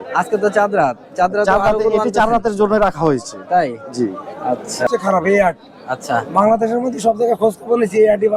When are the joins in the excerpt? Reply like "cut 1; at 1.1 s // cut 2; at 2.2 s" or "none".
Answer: cut 1; at 4.9 s

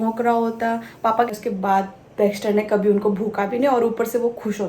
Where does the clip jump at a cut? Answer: cut 1; at 1.3 s

